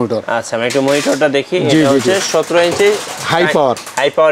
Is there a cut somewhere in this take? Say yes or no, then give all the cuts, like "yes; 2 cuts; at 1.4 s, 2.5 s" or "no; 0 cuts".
no; 0 cuts